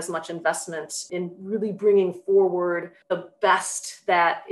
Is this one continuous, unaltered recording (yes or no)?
no